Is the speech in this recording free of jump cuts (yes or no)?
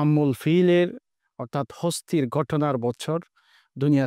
yes